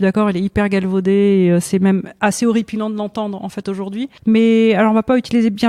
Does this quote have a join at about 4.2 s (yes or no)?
yes